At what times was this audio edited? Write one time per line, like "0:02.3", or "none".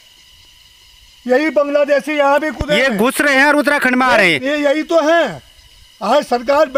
none